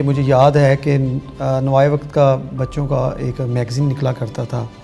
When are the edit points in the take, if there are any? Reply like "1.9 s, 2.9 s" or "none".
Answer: none